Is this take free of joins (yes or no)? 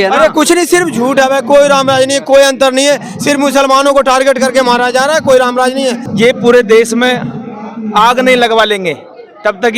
no